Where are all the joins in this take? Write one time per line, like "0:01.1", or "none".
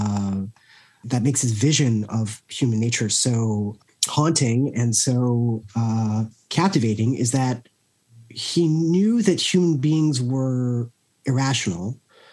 0:01.0
0:03.8
0:06.4